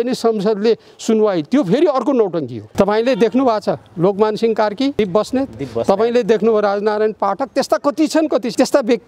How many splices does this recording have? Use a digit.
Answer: 1